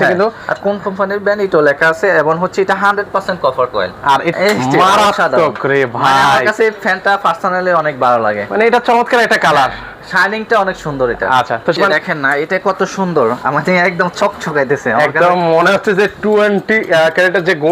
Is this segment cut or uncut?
cut